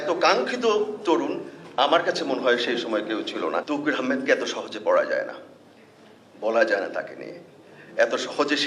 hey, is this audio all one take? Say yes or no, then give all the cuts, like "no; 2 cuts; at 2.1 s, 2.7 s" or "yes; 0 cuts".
no; 1 cut; at 3.6 s